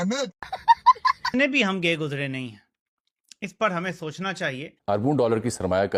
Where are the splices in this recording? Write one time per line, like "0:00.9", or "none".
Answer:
0:01.3

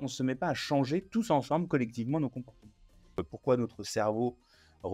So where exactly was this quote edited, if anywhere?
0:03.2

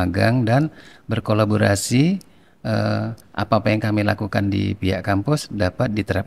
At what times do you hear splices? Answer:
none

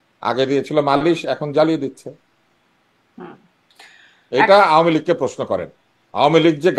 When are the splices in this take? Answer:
none

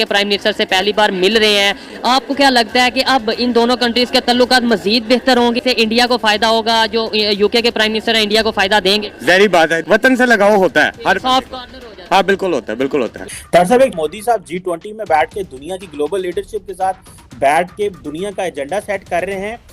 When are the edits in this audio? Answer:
0:01.9
0:13.2

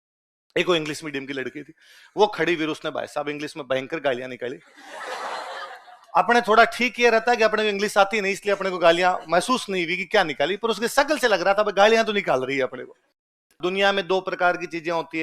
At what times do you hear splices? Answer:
0:13.6

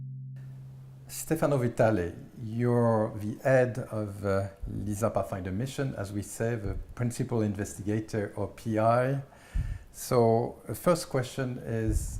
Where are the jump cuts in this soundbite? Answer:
0:01.2

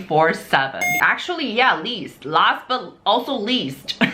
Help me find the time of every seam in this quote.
0:01.0

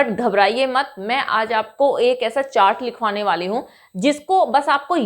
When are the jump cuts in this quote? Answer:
none

